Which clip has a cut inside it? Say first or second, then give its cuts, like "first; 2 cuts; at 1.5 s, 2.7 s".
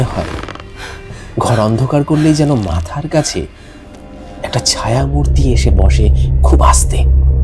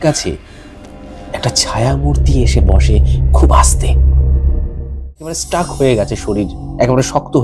second; 1 cut; at 5.3 s